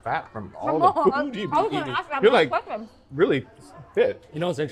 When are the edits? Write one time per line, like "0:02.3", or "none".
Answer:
none